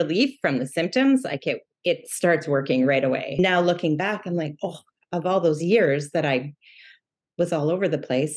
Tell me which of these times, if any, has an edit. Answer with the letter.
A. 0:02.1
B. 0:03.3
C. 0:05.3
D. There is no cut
B